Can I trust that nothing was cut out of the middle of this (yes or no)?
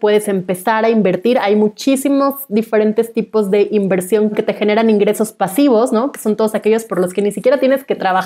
no